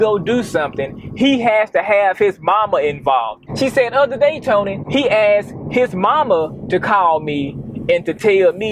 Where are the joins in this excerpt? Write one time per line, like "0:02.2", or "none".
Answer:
0:03.4